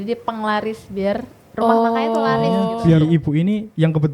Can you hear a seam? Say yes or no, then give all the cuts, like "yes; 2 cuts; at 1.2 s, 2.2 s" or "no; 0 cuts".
yes; 1 cut; at 2.8 s